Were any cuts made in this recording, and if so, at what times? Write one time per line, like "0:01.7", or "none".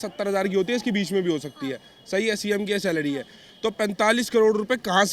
none